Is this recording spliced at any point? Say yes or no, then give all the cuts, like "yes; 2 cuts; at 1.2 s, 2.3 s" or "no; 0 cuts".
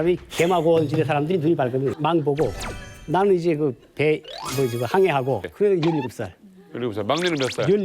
yes; 2 cuts; at 2.0 s, 5.5 s